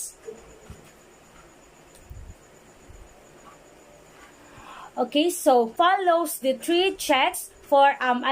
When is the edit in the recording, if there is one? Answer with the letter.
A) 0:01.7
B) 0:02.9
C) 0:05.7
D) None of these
C